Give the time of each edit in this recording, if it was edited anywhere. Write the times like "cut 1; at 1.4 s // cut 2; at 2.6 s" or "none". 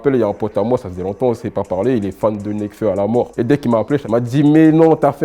cut 1; at 4.0 s